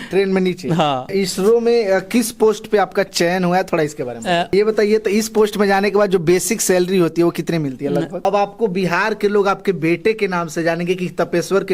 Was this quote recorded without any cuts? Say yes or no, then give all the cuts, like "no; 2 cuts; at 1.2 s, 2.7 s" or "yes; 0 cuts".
no; 3 cuts; at 1.1 s, 4.5 s, 8.2 s